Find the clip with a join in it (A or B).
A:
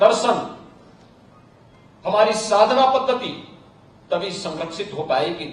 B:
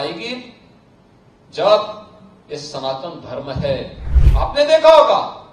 B